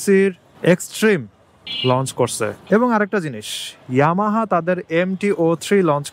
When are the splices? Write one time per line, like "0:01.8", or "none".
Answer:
0:02.6